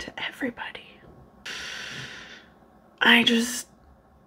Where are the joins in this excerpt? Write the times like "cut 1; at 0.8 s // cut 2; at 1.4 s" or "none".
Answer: cut 1; at 1.5 s